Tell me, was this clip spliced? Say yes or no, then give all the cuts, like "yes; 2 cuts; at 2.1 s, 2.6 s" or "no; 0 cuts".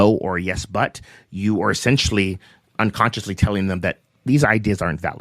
yes; 1 cut; at 2.7 s